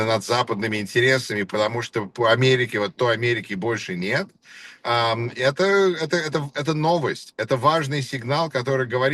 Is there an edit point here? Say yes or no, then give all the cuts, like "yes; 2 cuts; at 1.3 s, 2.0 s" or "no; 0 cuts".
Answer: no; 0 cuts